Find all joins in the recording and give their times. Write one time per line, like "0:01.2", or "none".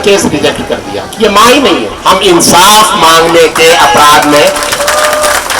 0:01.9